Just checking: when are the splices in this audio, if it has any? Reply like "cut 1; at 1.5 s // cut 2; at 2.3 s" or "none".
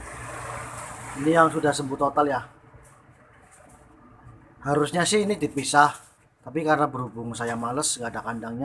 none